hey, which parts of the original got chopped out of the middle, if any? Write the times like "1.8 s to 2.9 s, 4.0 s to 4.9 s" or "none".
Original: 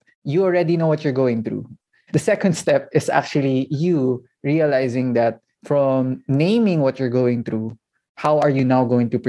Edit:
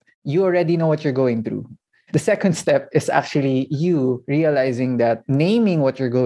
4.2 s to 4.4 s, 5.4 s to 6.2 s